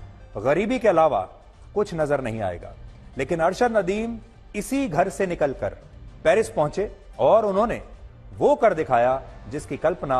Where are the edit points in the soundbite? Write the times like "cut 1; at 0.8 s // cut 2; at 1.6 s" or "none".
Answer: none